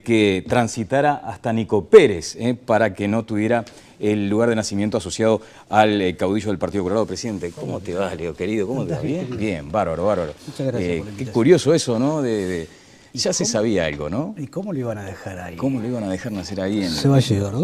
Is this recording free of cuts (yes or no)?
no